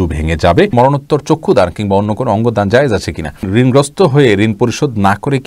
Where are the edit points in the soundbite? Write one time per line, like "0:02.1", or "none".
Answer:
0:00.7
0:03.4